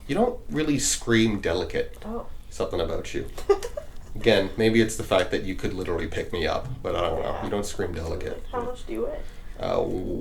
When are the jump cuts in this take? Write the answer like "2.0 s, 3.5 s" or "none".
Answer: none